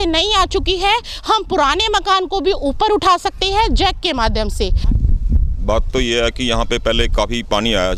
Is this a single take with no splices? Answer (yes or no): no